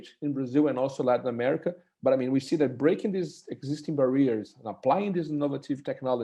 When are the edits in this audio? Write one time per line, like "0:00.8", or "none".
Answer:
none

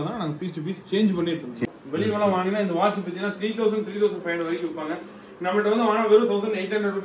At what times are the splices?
0:01.6

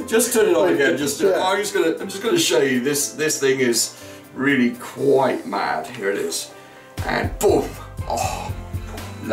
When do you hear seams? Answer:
none

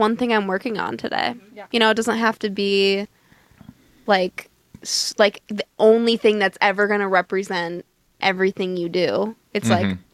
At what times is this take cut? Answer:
none

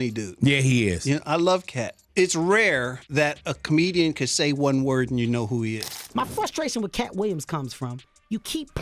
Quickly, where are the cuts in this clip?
0:06.0

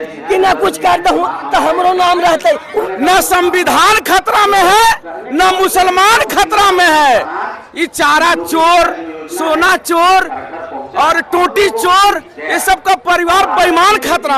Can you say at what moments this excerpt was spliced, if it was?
0:02.8

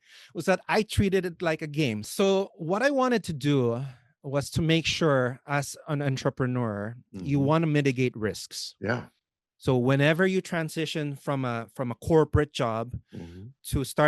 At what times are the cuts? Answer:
0:02.1

